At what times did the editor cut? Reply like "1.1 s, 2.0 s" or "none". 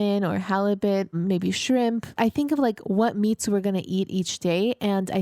1.1 s, 2.2 s